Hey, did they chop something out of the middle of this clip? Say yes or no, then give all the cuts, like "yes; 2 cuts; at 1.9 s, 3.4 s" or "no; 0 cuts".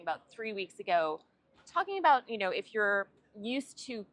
no; 0 cuts